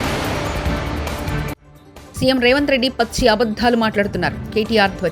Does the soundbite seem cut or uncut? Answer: cut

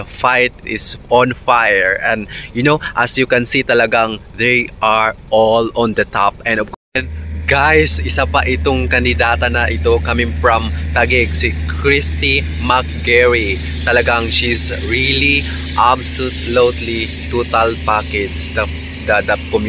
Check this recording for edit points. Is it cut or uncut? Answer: cut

